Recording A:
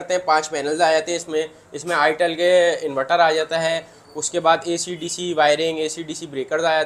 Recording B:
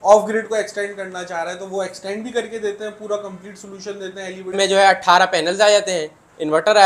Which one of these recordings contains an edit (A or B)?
B